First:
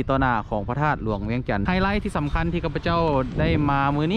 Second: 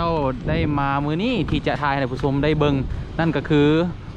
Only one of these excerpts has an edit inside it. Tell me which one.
first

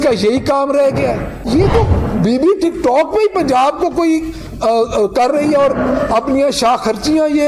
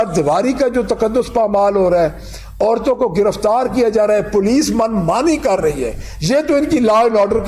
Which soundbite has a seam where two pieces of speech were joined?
first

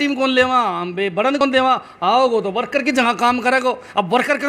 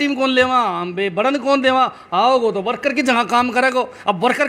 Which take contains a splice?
first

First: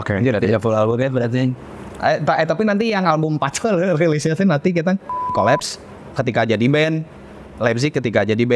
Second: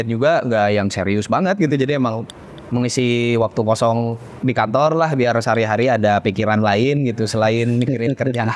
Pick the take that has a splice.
first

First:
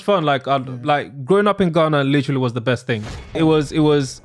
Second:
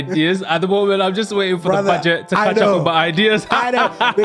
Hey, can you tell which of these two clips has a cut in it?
first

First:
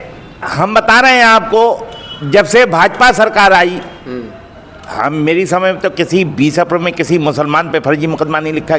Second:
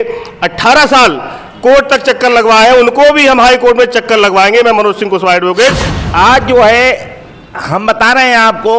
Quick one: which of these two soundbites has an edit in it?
second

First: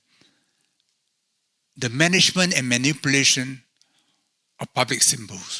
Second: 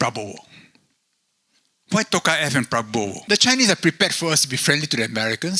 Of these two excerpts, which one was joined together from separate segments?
second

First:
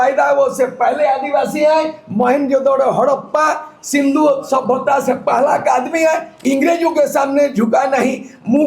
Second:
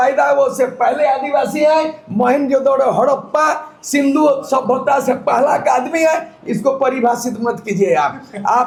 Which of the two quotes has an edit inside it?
first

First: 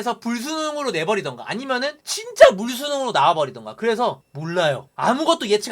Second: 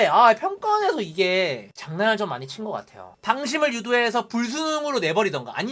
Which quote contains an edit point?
second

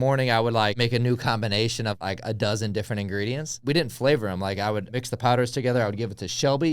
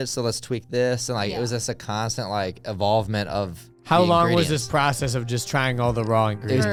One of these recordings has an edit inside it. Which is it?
first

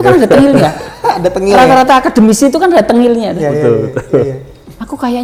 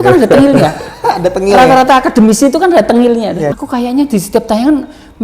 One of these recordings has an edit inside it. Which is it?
second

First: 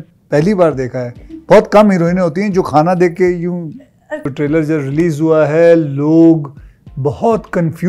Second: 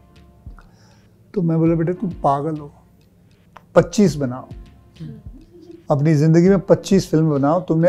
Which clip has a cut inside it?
first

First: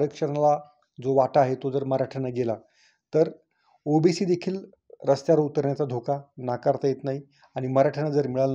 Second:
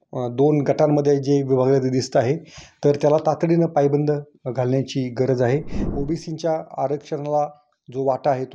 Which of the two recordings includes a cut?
second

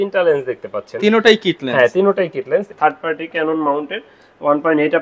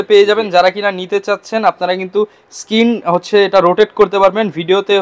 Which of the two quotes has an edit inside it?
first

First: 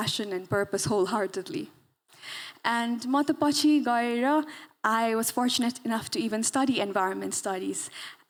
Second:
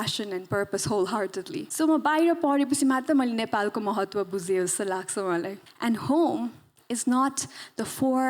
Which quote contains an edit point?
second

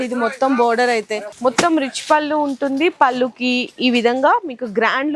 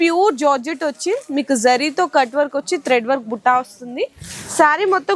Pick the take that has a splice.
first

